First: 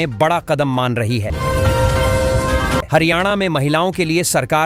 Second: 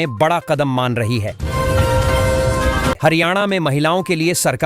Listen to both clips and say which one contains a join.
second; 2 cuts; at 1.4 s, 3.0 s

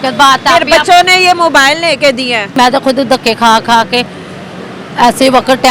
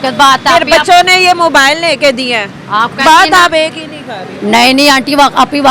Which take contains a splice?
first; 1 cut; at 2.5 s

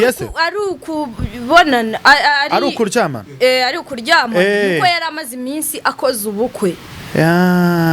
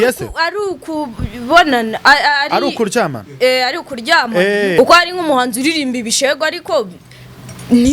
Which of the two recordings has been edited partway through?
second; 1 cut; at 4.7 s

